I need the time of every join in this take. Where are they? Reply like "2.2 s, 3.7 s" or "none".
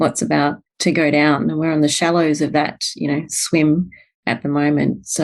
none